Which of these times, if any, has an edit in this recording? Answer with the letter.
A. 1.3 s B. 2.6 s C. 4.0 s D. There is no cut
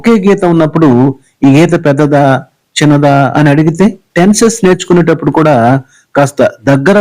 C